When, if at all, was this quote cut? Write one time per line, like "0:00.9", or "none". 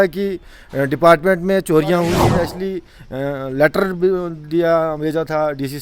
0:02.2